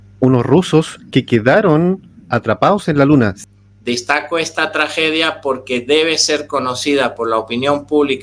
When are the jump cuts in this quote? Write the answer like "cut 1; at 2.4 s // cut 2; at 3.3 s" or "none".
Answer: cut 1; at 3.4 s